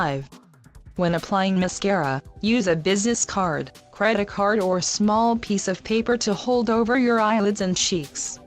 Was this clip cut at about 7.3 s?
no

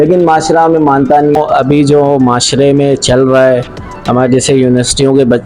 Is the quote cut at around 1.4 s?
yes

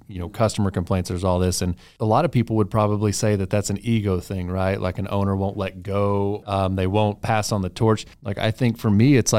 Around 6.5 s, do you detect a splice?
yes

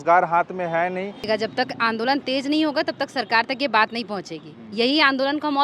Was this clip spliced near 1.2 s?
yes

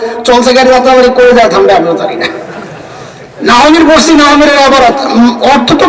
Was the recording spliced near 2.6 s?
no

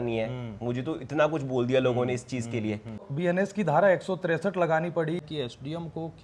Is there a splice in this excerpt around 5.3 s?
yes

